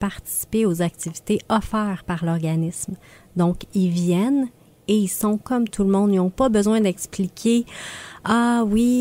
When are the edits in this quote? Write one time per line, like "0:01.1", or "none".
none